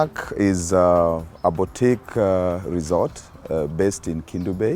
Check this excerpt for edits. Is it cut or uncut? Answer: uncut